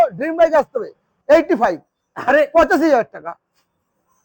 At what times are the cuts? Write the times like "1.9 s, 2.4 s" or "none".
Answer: 1.0 s